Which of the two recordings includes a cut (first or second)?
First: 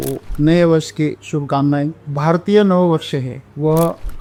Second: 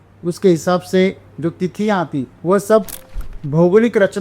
second